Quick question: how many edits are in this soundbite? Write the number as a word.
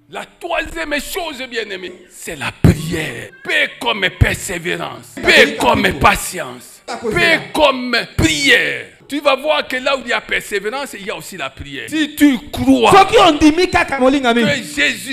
seven